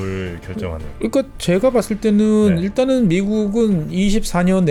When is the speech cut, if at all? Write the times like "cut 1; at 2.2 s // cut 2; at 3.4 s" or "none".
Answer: none